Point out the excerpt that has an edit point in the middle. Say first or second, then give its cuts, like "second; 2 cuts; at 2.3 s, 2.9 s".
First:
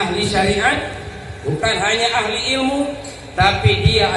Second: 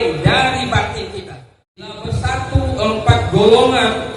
second; 1 cut; at 2.0 s